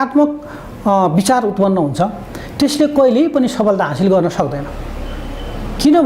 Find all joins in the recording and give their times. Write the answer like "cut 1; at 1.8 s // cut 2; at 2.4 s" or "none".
none